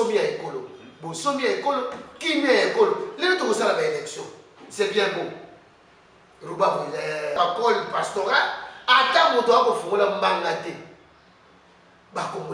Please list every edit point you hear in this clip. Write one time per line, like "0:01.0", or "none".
0:07.3